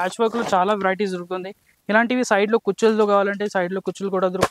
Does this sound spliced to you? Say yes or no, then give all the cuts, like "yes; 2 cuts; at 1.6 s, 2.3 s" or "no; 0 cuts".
no; 0 cuts